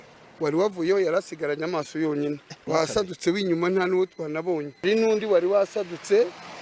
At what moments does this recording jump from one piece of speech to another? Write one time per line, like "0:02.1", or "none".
0:02.5
0:04.8